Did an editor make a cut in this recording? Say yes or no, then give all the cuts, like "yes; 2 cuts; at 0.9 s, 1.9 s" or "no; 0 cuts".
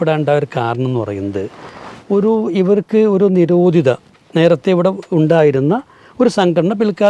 no; 0 cuts